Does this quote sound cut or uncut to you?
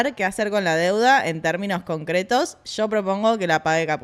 uncut